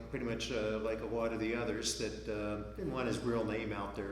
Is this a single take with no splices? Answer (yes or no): no